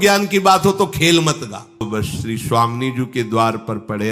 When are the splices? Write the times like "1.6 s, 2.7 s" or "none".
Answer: 1.8 s